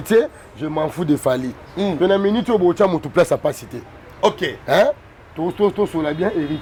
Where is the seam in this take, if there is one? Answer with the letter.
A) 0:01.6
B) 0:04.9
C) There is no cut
C